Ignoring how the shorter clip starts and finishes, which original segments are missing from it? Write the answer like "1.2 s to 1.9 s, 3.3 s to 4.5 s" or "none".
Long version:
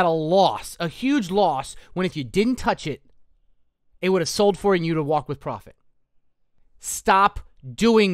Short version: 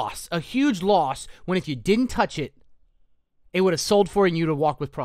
none